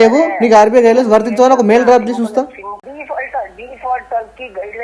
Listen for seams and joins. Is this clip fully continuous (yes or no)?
no